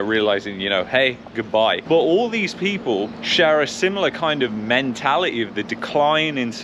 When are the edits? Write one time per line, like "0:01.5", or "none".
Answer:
0:01.8